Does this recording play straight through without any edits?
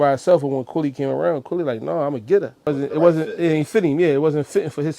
no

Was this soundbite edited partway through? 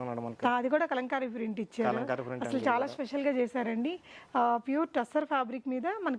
no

